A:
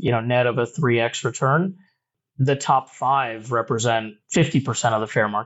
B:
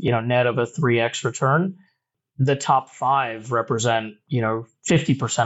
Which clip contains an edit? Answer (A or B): A